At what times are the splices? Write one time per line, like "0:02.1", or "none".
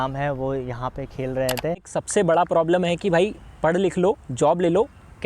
0:02.0